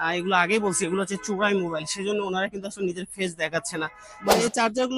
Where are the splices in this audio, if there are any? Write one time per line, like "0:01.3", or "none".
0:04.1